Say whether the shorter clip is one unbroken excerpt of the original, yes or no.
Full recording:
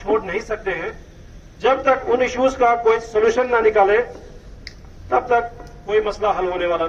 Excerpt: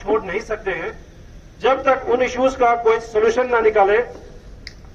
yes